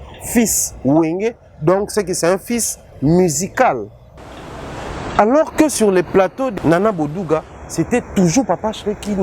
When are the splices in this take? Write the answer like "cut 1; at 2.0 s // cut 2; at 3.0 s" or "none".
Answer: cut 1; at 6.5 s

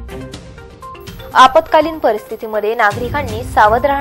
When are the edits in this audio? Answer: cut 1; at 1.0 s

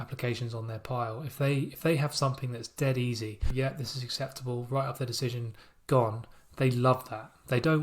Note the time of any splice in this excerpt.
cut 1; at 3.5 s

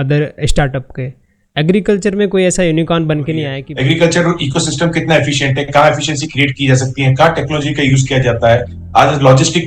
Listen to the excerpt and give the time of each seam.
cut 1; at 3.6 s

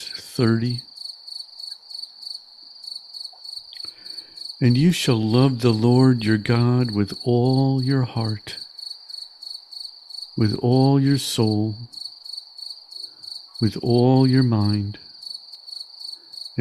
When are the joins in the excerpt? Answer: cut 1; at 8.6 s // cut 2; at 10.3 s // cut 3; at 11.9 s // cut 4; at 13.6 s

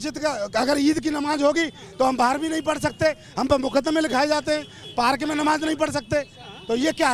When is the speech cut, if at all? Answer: none

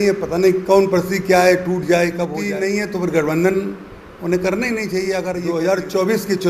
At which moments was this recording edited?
cut 1; at 2.4 s // cut 2; at 5.4 s

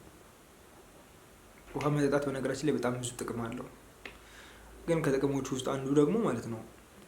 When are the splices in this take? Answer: cut 1; at 1.7 s

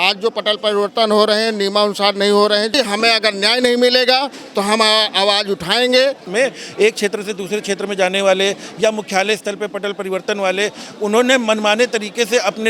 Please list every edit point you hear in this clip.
cut 1; at 2.7 s // cut 2; at 6.2 s

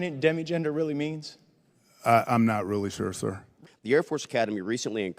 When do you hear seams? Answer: cut 1; at 3.5 s

